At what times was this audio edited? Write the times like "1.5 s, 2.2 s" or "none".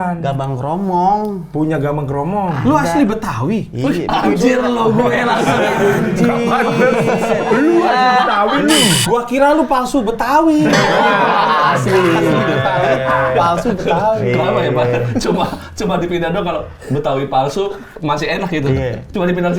none